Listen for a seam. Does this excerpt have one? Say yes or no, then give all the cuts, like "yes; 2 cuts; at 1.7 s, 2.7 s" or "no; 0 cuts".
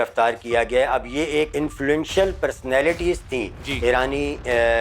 yes; 1 cut; at 1.5 s